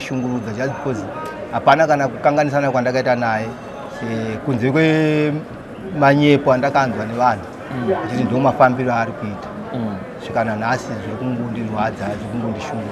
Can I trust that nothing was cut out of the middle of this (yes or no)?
yes